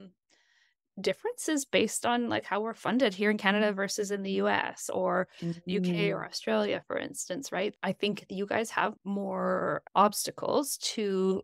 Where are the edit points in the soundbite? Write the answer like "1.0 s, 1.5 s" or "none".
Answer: none